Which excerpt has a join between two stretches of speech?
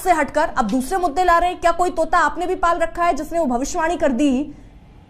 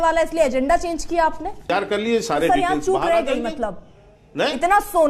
second; 1 cut; at 1.7 s

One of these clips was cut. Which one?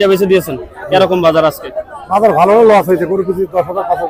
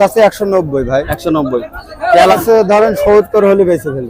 second; 1 cut; at 2.4 s

